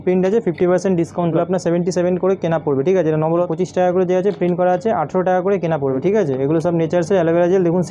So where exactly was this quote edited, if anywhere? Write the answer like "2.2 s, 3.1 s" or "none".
1.3 s, 3.5 s, 6.0 s

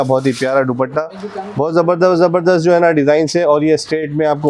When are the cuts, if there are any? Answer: none

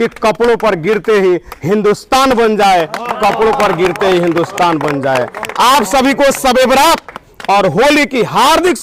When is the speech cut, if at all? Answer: none

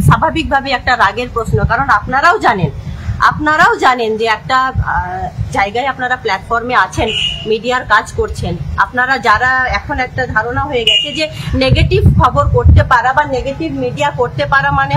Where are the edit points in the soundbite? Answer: none

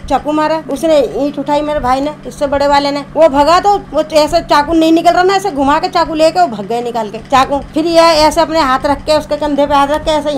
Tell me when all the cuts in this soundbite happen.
none

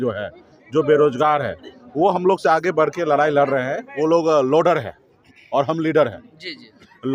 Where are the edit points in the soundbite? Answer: 3.8 s

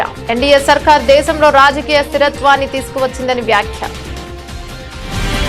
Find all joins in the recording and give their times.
4.1 s

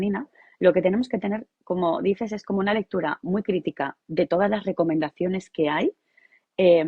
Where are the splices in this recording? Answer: none

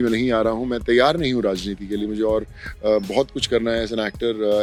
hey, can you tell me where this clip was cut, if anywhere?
none

